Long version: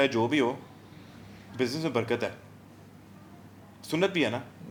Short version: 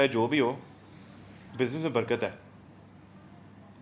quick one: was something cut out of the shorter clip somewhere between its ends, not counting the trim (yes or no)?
no